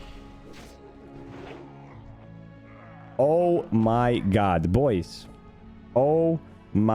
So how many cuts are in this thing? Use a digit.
0